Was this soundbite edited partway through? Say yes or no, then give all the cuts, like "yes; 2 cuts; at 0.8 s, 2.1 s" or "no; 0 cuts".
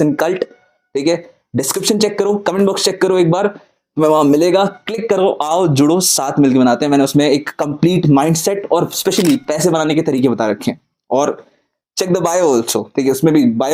no; 0 cuts